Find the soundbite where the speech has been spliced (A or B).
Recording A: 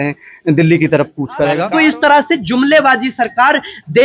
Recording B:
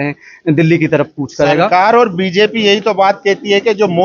A